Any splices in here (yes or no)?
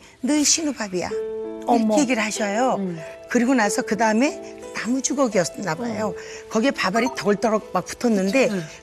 no